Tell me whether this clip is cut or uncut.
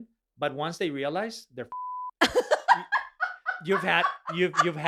uncut